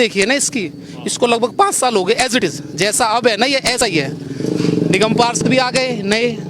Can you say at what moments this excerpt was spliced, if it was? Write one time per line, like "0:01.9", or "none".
none